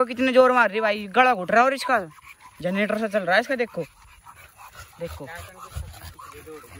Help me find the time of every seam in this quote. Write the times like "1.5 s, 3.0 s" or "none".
none